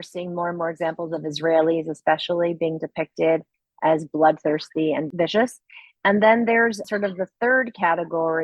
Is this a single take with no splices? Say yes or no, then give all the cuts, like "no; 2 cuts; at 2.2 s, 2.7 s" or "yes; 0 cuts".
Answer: no; 1 cut; at 6.8 s